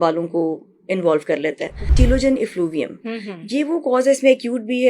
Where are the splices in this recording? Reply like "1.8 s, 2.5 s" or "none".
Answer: 1.9 s

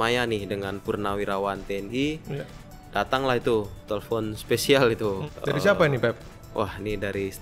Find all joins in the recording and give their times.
none

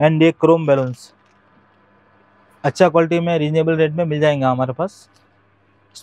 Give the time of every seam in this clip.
none

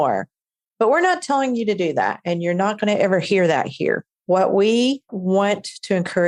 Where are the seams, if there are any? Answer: 5.1 s

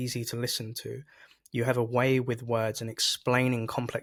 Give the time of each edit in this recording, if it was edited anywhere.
none

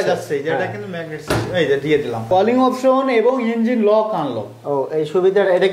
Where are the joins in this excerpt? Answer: 2.3 s

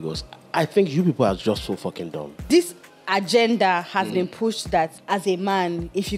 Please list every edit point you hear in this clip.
2.4 s, 5.0 s

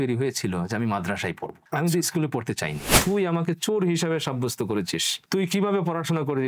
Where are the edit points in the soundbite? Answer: 1.5 s, 2.9 s

